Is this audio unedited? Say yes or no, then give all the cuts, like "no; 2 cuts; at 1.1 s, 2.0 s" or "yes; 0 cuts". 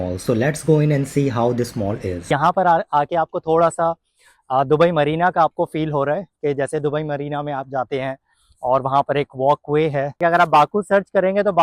no; 2 cuts; at 2.3 s, 10.2 s